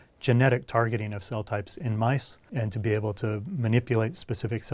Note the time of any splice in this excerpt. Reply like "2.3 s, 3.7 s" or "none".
2.4 s